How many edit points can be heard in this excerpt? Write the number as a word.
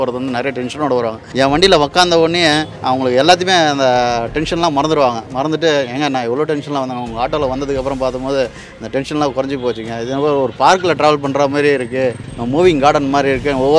three